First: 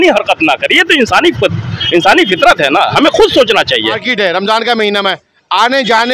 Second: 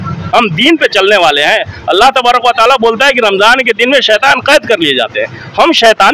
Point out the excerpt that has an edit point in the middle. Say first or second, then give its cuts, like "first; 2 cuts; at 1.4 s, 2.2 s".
first; 1 cut; at 4.0 s